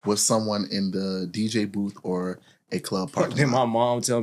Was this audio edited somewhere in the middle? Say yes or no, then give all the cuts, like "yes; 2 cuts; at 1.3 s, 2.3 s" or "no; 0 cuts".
yes; 1 cut; at 3.1 s